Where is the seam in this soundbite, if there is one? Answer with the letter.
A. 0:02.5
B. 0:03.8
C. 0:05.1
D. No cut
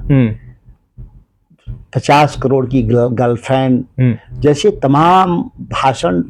D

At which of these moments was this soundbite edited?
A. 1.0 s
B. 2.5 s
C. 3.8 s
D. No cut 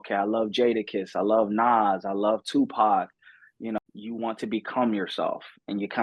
C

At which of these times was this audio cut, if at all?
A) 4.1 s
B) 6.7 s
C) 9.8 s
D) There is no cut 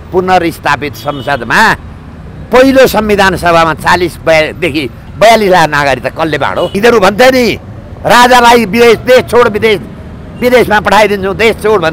B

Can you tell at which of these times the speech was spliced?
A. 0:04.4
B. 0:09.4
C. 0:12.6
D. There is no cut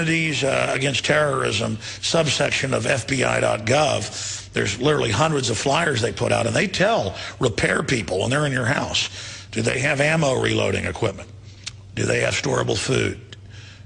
C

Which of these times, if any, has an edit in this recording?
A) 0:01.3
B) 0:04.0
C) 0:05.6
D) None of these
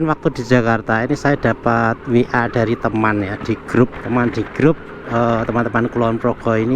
B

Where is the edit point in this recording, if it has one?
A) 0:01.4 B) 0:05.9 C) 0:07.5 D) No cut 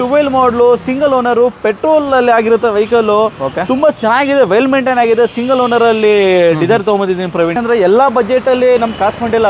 C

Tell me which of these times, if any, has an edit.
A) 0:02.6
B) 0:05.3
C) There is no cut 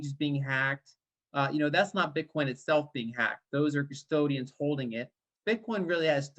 B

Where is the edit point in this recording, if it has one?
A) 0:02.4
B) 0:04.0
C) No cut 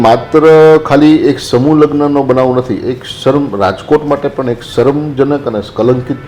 C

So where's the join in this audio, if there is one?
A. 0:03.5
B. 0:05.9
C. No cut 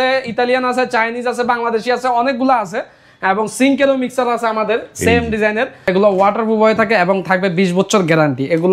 B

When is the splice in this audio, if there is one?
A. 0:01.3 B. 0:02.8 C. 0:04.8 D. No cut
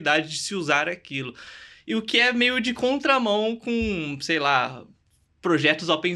D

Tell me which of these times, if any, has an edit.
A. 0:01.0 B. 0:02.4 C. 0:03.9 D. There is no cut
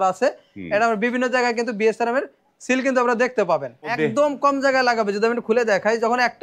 C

